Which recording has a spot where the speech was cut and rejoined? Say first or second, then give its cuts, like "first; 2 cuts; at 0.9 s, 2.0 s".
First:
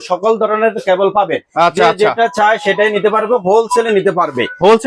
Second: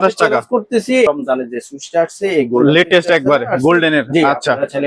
second; 1 cut; at 1.1 s